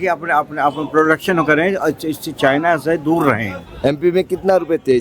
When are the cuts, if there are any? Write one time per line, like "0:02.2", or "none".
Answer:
0:03.6